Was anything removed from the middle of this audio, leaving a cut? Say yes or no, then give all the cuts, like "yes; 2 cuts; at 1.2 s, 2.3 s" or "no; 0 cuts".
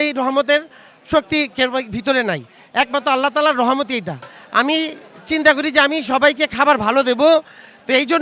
no; 0 cuts